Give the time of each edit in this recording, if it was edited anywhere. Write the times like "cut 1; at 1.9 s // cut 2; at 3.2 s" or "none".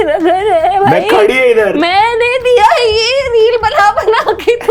none